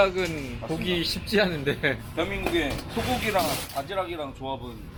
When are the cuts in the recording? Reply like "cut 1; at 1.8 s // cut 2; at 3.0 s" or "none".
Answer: none